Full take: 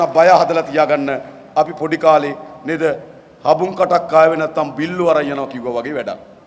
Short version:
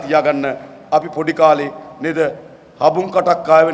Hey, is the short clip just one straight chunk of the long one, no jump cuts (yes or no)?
yes